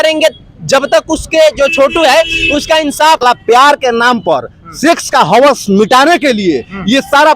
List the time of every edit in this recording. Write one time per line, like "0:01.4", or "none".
0:03.2